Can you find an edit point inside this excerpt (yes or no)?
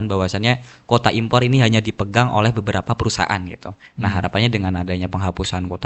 no